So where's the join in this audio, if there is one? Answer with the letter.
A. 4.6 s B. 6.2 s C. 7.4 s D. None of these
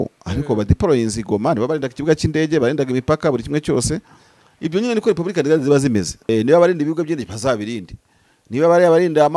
B